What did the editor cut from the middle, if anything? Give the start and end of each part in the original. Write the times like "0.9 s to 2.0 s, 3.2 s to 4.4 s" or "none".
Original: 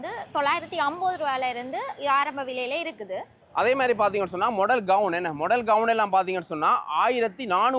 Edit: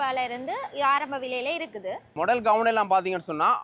3.4 s to 5.3 s